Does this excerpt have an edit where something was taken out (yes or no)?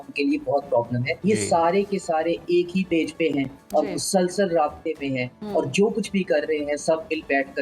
yes